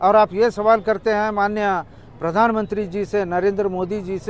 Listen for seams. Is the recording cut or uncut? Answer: uncut